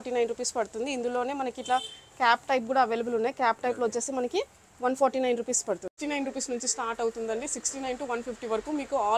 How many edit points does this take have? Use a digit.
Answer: 1